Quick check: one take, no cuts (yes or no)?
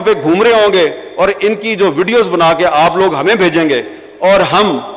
yes